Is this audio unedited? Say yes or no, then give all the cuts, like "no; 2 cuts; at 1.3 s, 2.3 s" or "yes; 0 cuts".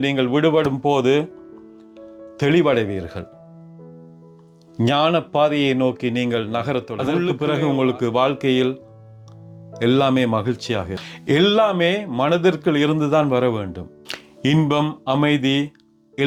yes; 0 cuts